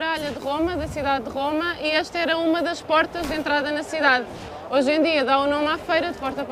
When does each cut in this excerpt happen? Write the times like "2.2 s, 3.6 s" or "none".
none

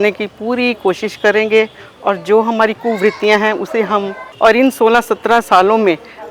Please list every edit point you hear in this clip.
4.2 s

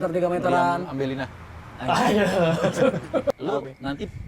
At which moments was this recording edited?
3.4 s

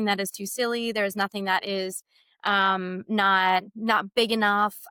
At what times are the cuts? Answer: none

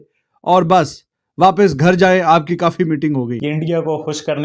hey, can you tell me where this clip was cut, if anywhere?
3.4 s

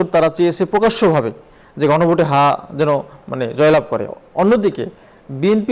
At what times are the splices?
none

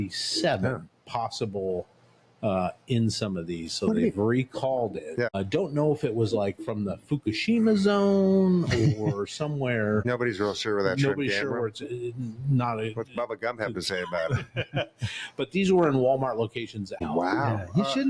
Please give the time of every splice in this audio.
5.4 s, 10.0 s, 17.0 s

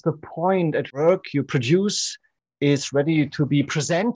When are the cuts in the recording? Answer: 0.9 s

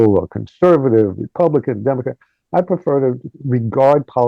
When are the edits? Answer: 3.3 s

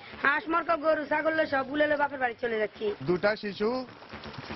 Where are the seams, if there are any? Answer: 3.0 s

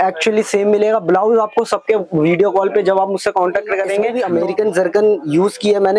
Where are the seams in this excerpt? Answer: 4.1 s

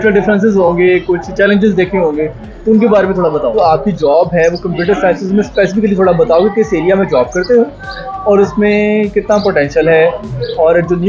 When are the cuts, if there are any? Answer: 3.6 s

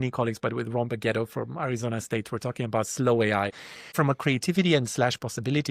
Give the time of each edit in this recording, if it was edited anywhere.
3.6 s

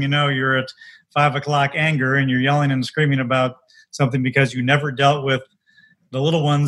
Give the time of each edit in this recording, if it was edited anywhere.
none

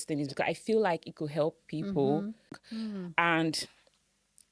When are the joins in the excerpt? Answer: 2.7 s

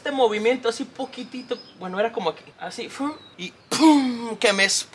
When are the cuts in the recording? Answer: none

